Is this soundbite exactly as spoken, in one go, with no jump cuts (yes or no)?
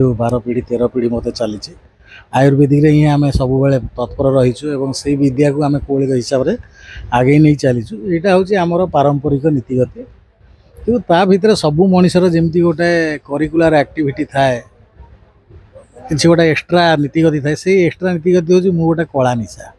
yes